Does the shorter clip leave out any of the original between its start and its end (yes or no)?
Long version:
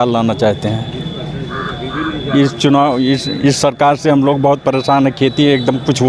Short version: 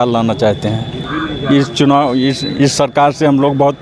yes